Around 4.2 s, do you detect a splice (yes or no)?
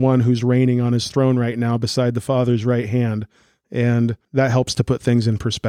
yes